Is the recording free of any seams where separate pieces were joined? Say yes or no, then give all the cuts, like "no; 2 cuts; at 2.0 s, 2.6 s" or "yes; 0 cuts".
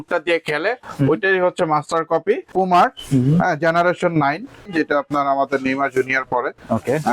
no; 2 cuts; at 2.5 s, 4.7 s